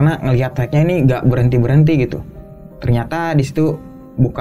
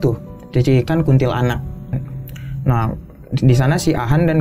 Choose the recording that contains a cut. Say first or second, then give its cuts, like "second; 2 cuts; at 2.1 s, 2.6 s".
second; 1 cut; at 2.0 s